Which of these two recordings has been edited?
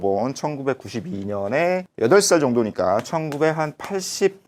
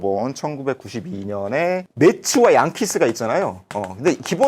second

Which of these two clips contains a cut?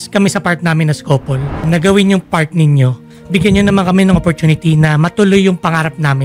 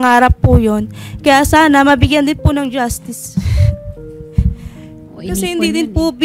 first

